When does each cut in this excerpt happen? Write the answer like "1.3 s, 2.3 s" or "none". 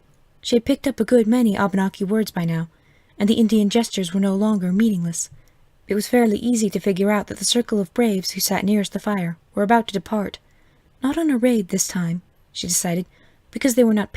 1.9 s